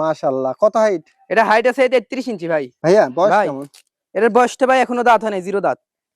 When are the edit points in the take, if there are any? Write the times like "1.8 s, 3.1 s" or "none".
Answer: 2.7 s

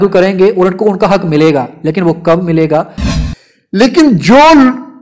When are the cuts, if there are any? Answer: 3.0 s

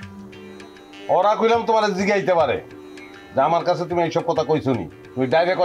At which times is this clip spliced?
none

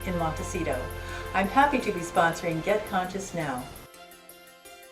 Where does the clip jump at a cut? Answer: 3.8 s

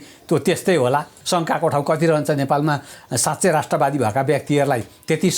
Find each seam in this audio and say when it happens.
1.2 s

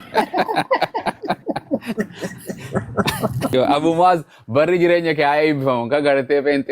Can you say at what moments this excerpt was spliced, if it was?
3.5 s

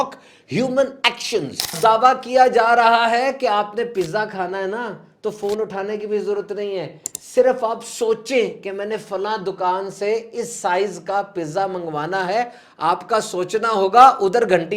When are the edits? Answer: 1.7 s

